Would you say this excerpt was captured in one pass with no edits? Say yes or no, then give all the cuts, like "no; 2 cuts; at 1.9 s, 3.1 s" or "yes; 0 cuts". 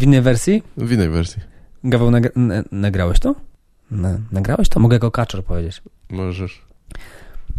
no; 1 cut; at 3.8 s